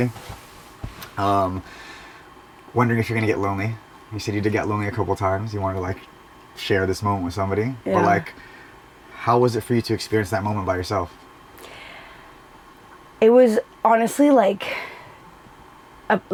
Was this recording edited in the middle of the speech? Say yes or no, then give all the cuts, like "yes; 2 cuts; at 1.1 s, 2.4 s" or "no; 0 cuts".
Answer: no; 0 cuts